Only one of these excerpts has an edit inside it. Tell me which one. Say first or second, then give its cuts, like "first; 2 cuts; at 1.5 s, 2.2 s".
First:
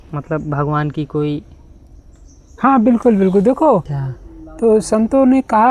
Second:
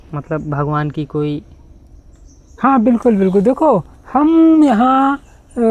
first; 1 cut; at 4.0 s